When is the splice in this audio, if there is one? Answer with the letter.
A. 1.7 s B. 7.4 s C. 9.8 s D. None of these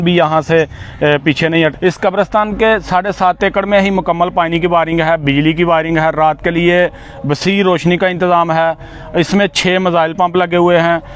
A